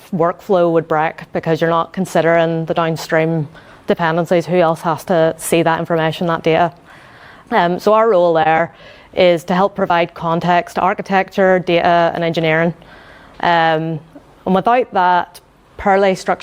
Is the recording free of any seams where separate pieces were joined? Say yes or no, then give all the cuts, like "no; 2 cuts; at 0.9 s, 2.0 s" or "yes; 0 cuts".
no; 1 cut; at 7.4 s